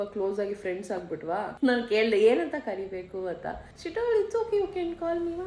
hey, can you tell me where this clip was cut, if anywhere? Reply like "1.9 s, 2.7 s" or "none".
none